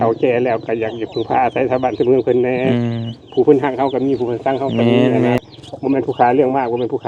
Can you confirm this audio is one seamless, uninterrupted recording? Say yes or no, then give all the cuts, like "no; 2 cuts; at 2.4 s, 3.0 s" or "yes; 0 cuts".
no; 1 cut; at 5.4 s